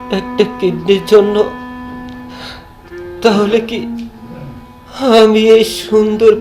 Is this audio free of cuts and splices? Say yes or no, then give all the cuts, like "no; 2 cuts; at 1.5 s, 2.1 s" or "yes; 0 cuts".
yes; 0 cuts